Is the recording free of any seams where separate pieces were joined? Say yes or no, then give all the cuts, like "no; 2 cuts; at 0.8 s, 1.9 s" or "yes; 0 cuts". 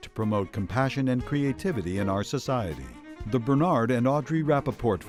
yes; 0 cuts